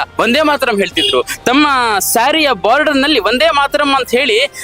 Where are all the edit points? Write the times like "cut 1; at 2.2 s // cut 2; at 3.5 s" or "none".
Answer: none